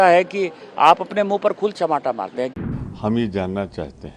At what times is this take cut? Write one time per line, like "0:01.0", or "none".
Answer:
0:02.5